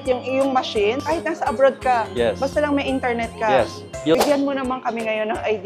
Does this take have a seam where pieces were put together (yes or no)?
yes